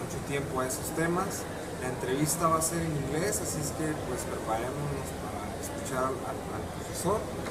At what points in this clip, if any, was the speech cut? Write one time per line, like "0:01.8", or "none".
none